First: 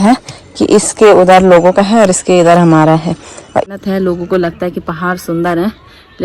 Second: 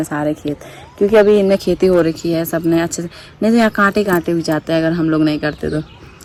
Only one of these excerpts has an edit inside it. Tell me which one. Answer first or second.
first